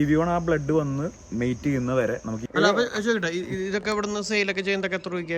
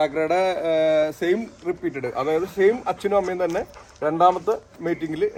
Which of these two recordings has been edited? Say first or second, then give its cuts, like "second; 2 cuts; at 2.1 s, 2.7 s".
first; 1 cut; at 2.4 s